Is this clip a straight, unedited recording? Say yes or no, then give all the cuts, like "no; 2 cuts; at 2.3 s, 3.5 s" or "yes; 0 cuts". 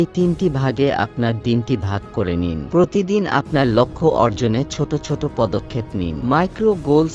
no; 1 cut; at 6.2 s